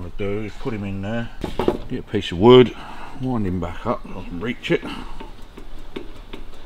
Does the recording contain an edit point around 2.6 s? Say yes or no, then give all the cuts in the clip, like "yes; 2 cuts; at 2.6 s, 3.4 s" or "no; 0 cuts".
no; 1 cut; at 1.4 s